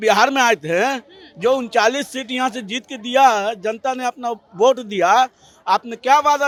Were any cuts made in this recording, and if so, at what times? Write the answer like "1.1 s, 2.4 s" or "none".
none